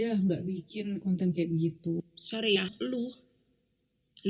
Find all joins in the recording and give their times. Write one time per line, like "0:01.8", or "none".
0:02.7